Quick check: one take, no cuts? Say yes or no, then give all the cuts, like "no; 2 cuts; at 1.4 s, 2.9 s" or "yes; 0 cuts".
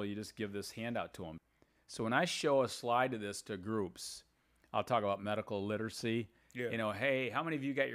no; 1 cut; at 1.4 s